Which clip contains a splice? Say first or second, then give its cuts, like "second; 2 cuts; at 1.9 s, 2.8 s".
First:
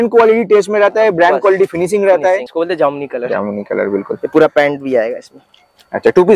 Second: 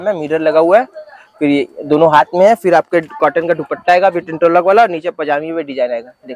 first; 1 cut; at 2.5 s